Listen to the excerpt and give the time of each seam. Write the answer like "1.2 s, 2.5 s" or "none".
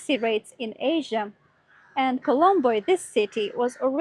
none